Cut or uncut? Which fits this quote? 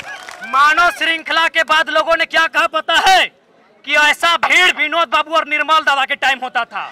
uncut